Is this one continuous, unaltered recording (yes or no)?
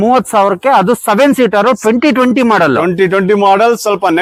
yes